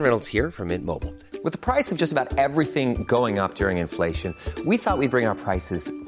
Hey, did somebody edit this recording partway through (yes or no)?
no